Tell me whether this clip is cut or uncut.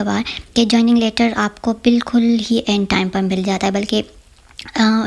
uncut